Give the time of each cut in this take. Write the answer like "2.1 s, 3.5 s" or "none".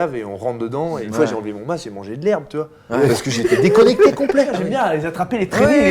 1.0 s, 4.6 s